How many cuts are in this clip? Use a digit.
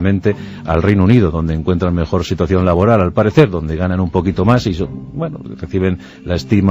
0